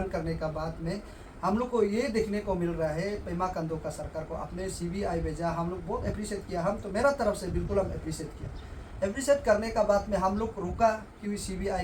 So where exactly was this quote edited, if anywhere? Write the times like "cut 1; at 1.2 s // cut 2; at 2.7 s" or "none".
none